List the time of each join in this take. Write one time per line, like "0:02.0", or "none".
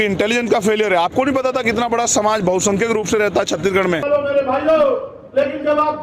0:04.0